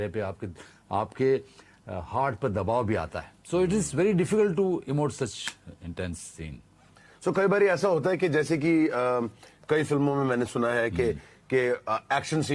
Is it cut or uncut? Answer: uncut